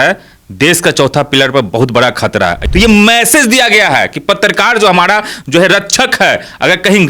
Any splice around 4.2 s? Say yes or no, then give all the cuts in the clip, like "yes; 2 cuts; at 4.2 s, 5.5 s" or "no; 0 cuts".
no; 1 cut; at 2.6 s